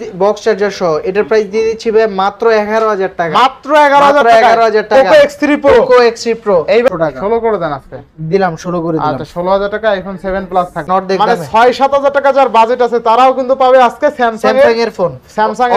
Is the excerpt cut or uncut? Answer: cut